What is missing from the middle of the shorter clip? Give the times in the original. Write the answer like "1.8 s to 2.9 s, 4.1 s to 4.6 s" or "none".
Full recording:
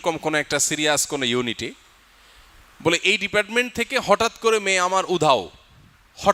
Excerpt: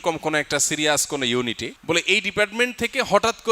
1.7 s to 2.7 s